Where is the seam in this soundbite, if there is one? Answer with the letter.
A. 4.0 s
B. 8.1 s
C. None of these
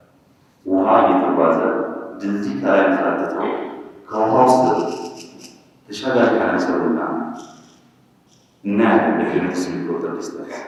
C